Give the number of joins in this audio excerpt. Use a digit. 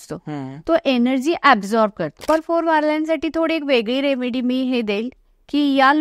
1